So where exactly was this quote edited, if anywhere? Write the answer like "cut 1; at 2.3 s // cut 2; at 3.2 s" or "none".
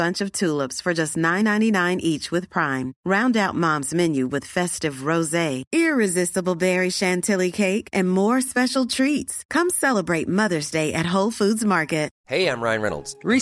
cut 1; at 12.2 s